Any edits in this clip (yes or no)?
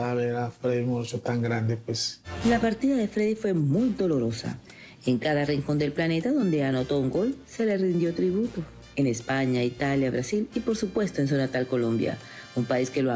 yes